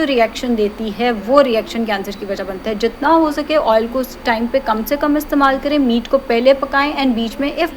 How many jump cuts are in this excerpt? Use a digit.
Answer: 0